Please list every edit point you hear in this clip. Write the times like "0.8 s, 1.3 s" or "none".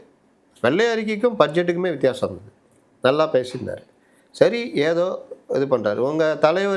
none